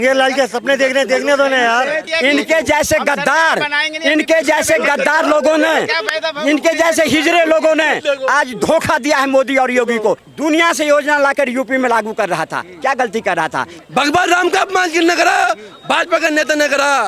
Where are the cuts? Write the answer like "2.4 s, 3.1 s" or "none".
2.1 s, 10.3 s, 13.8 s